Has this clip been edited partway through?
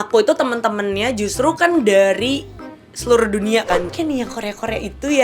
yes; 1 cut; at 3.8 s

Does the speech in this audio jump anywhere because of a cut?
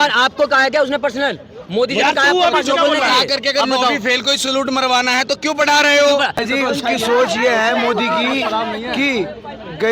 yes; 1 cut; at 6.4 s

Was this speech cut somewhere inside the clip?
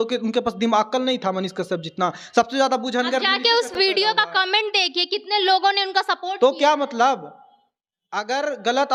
no; 0 cuts

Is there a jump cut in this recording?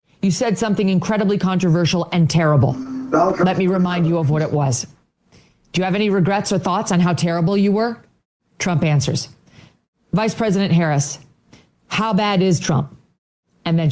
no; 0 cuts

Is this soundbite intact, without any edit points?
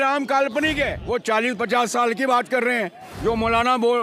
no; 1 cut; at 1.0 s

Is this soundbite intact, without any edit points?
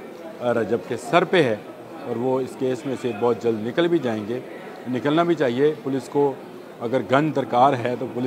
yes; 0 cuts

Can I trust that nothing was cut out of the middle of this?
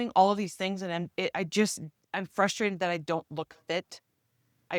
yes; 0 cuts

